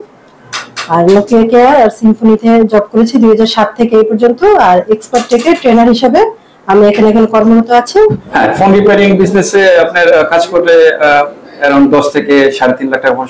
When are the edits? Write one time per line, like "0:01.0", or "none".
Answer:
0:08.2